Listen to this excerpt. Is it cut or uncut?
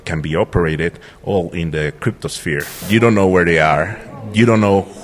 cut